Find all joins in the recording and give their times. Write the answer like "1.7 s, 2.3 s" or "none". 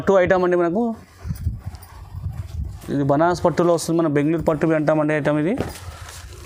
none